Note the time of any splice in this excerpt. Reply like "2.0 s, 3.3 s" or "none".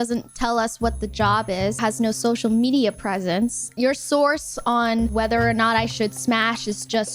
1.8 s